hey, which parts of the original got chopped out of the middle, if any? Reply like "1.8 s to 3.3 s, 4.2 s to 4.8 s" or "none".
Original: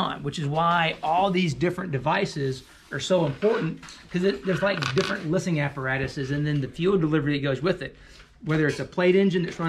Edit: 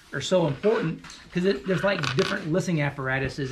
none